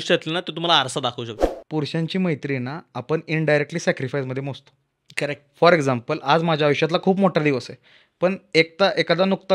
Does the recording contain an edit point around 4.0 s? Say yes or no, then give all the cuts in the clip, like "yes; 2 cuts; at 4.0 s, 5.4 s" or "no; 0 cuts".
no; 1 cut; at 1.4 s